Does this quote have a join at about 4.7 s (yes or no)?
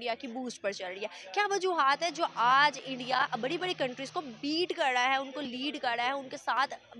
no